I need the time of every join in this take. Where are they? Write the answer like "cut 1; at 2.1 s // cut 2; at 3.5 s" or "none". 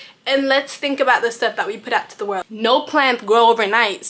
cut 1; at 2.7 s